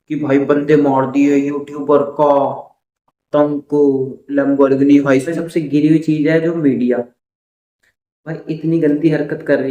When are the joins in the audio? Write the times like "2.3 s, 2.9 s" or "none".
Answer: 5.3 s